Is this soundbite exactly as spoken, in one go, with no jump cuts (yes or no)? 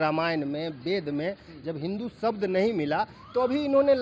yes